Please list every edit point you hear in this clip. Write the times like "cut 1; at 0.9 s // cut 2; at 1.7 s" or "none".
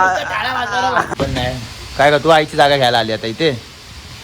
cut 1; at 1.1 s